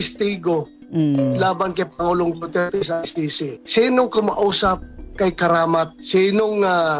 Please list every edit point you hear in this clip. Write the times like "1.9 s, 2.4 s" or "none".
3.6 s